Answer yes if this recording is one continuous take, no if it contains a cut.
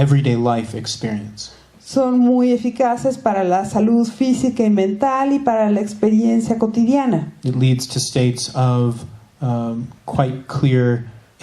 no